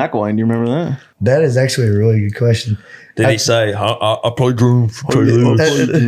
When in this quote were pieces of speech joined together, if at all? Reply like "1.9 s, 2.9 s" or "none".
1.0 s

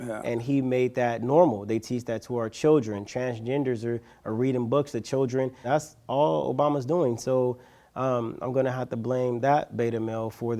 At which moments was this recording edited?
5.6 s

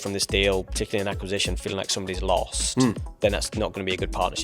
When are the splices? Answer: none

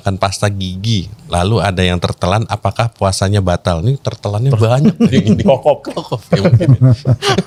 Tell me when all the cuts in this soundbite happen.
none

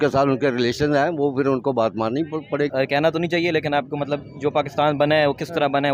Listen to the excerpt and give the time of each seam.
2.7 s

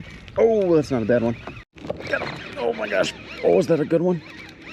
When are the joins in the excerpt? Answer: 1.7 s

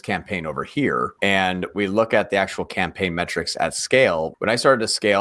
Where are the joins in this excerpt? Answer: 1.1 s, 4.3 s

